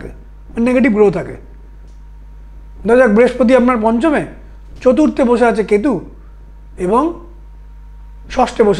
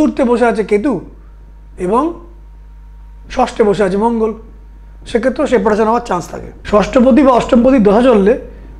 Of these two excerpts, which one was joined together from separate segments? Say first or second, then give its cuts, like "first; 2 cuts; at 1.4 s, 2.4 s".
second; 1 cut; at 6.5 s